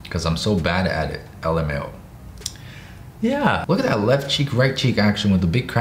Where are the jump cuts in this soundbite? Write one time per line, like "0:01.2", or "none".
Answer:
0:03.6